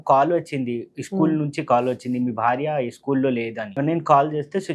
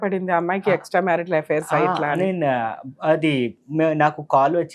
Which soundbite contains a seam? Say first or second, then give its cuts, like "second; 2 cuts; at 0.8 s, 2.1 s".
first; 1 cut; at 3.7 s